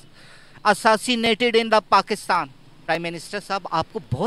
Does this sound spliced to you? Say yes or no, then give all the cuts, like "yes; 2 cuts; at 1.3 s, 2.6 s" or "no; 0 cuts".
yes; 1 cut; at 2.7 s